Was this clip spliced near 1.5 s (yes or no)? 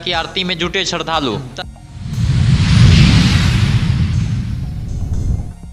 yes